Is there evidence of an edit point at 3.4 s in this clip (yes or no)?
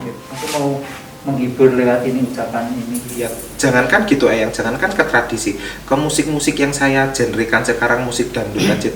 yes